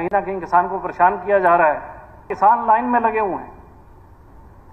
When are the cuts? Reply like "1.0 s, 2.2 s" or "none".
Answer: 2.3 s